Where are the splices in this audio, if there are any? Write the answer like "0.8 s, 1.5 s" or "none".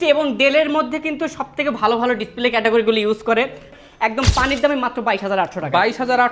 3.7 s

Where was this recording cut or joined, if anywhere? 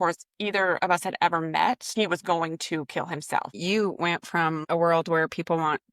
1.9 s, 3.5 s, 4.6 s

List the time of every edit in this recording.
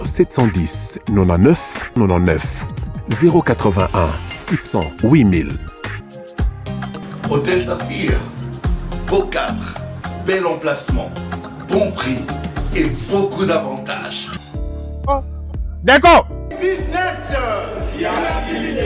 16.4 s

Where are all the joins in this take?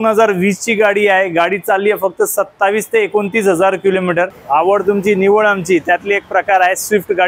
4.4 s

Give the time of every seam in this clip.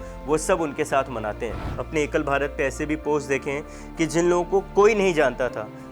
1.8 s

